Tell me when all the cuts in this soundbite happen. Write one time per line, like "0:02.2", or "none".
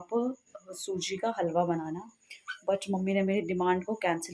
none